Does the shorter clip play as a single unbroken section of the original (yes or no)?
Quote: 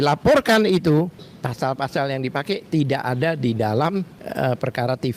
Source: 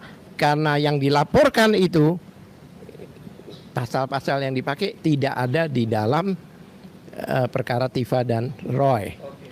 no